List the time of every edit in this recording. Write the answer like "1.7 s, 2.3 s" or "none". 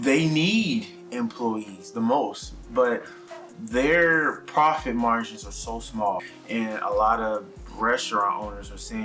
6.2 s